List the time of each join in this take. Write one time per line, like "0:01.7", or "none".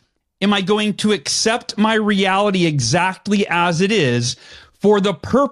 none